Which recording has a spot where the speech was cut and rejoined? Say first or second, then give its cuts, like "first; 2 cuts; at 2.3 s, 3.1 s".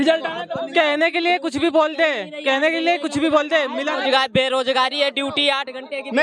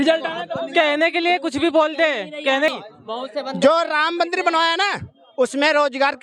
second; 1 cut; at 2.7 s